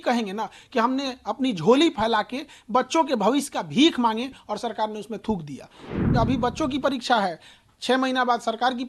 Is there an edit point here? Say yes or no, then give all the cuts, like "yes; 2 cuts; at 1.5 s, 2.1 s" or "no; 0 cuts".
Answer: yes; 1 cut; at 6.0 s